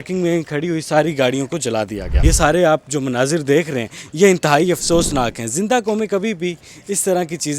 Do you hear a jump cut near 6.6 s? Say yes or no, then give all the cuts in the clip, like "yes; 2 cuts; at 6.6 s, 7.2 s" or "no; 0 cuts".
no; 1 cut; at 2.0 s